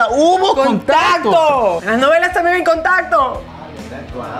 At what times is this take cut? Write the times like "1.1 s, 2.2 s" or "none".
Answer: 1.8 s, 3.5 s